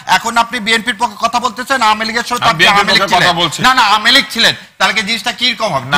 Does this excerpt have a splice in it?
no; 0 cuts

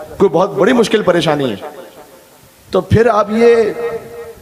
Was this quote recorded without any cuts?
yes; 0 cuts

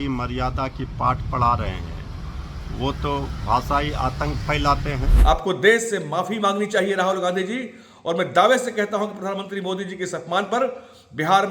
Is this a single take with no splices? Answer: no; 1 cut; at 5.1 s

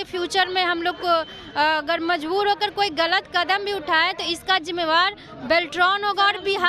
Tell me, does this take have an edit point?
no; 0 cuts

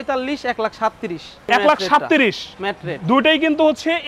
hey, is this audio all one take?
no; 1 cut; at 1.3 s

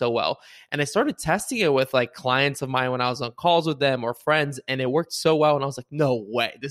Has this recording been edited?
no; 0 cuts

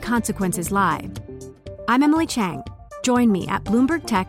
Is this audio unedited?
yes; 0 cuts

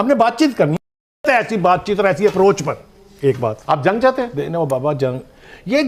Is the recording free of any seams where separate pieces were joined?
yes; 0 cuts

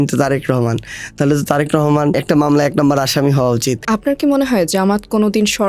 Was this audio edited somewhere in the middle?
yes; 2 cuts; at 2.2 s, 3.8 s

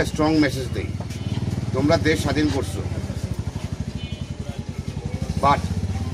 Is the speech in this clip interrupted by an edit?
no; 0 cuts

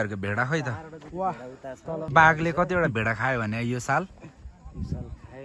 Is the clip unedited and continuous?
no; 1 cut; at 2.1 s

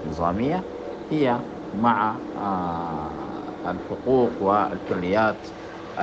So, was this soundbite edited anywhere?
no; 0 cuts

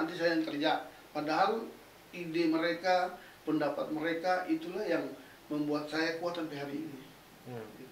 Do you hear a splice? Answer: no; 0 cuts

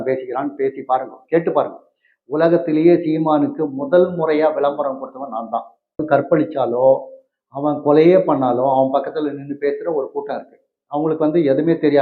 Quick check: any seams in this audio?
yes; 1 cut; at 6.0 s

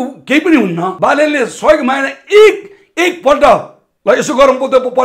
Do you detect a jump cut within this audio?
yes; 1 cut; at 0.9 s

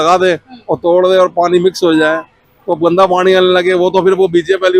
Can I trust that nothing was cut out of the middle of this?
yes; 0 cuts

